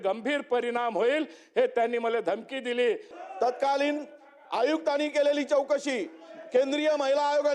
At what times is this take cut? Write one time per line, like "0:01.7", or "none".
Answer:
0:03.1